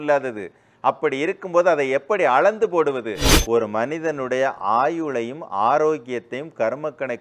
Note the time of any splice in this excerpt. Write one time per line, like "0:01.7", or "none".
0:03.3